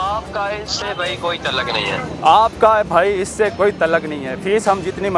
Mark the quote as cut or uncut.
uncut